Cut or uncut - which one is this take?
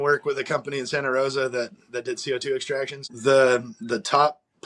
cut